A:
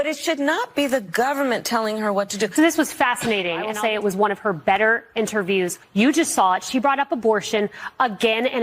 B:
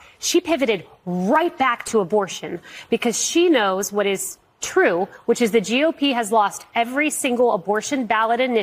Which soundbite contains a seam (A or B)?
A